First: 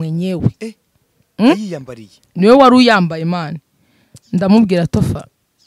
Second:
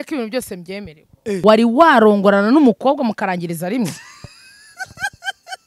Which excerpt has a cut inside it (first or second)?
second